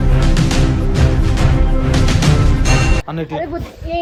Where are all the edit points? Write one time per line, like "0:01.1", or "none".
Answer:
none